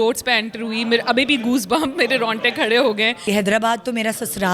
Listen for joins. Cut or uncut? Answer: cut